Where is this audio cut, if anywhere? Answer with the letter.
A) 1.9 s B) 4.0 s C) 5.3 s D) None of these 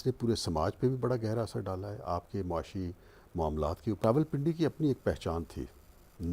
B